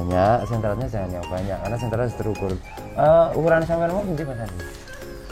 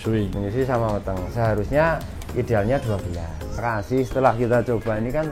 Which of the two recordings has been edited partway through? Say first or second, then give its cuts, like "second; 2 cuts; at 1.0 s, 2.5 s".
second; 1 cut; at 3.6 s